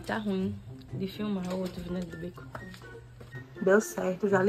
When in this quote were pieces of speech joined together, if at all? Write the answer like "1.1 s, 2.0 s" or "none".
3.0 s